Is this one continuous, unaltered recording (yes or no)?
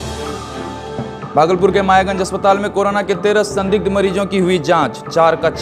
no